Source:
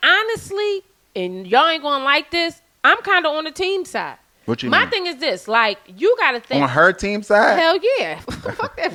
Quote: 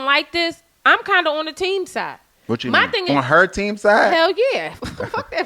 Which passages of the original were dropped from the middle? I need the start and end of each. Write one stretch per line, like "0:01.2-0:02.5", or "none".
0:05.0-0:06.5